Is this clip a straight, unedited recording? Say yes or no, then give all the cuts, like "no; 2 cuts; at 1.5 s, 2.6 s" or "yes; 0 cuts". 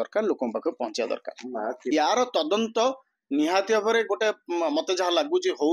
no; 1 cut; at 1.8 s